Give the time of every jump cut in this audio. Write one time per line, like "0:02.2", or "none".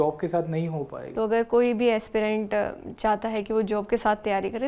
0:01.0